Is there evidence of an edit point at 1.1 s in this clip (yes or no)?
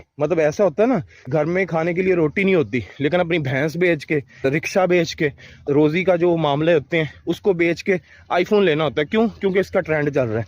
yes